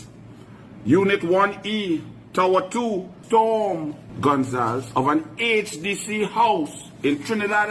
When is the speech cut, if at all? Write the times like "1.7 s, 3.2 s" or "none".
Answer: 3.2 s, 4.0 s